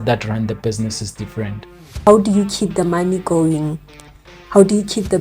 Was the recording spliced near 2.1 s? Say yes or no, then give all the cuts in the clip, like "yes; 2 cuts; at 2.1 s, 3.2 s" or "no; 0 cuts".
yes; 1 cut; at 2.1 s